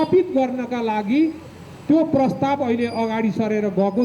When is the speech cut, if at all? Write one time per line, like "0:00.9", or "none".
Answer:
none